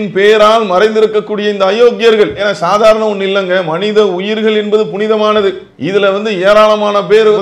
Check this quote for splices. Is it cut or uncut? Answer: uncut